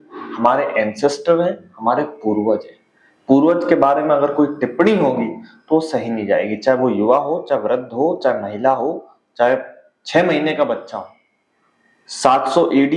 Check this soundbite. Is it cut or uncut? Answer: uncut